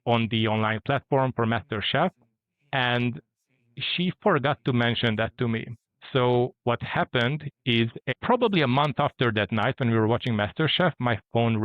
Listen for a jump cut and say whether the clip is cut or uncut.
uncut